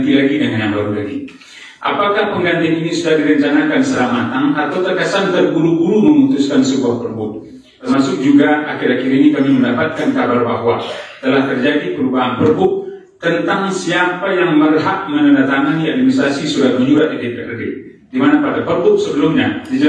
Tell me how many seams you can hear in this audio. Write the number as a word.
one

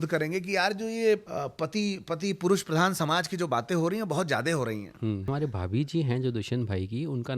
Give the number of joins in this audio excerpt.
two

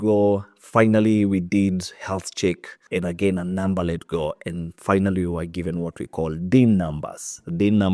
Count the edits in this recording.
one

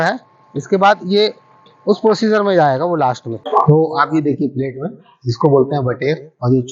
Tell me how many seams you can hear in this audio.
one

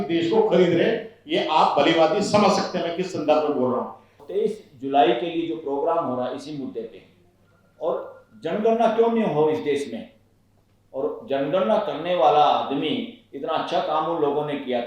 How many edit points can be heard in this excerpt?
one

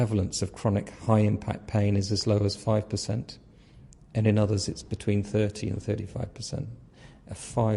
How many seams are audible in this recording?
zero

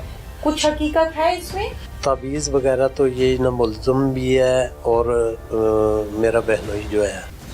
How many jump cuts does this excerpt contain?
one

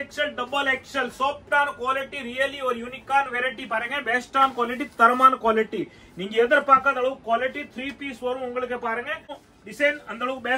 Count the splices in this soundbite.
one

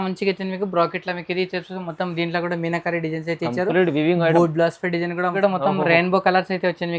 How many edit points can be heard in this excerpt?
one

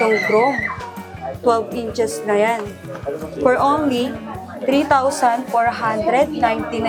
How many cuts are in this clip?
zero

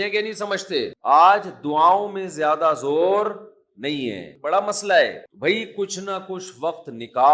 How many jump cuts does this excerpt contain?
one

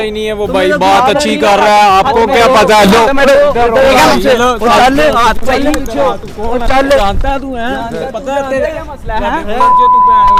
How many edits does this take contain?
zero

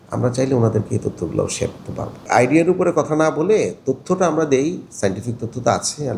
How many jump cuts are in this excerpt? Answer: one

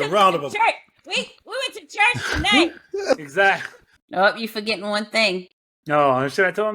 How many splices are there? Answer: one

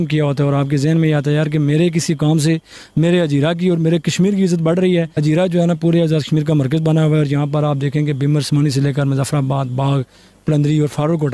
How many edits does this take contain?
one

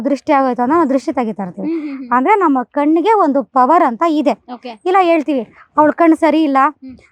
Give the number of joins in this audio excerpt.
zero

